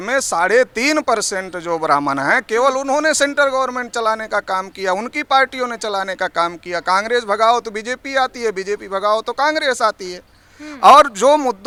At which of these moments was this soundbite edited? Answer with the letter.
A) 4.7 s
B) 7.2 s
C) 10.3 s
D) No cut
D